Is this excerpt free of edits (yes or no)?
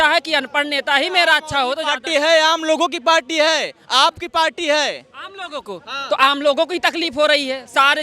yes